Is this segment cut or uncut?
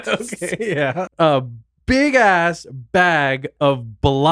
cut